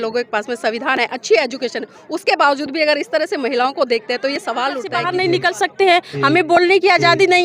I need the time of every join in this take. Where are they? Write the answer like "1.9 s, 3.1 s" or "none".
4.9 s